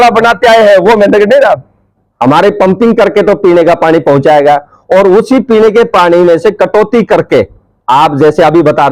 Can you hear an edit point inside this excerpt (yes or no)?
yes